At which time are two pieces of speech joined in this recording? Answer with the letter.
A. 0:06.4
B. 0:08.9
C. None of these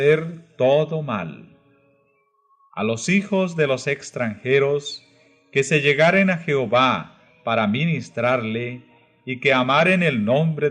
A